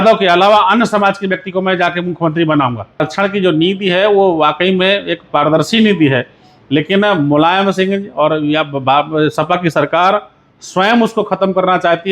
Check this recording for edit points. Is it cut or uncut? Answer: cut